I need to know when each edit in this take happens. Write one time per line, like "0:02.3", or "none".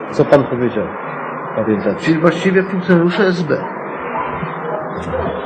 none